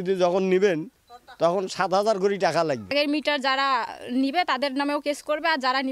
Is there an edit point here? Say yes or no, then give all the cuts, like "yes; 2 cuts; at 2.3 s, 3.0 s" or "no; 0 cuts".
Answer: yes; 1 cut; at 2.9 s